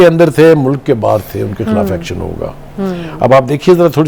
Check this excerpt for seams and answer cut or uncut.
uncut